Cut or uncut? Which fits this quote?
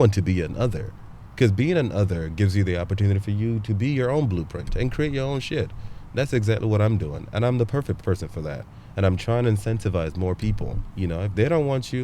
cut